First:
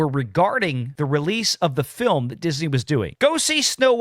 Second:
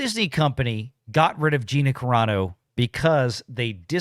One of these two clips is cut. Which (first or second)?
first